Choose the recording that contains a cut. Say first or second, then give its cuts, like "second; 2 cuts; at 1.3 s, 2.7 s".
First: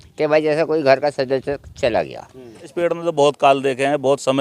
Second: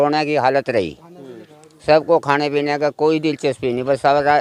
first; 1 cut; at 2.7 s